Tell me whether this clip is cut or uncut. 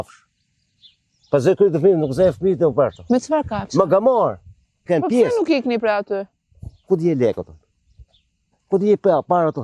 cut